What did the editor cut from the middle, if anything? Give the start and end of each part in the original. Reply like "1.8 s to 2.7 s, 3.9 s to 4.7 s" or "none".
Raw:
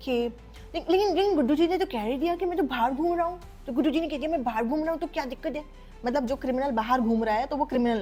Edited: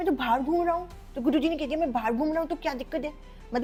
none